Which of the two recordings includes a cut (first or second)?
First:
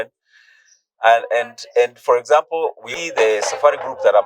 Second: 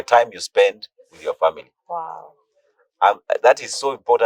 first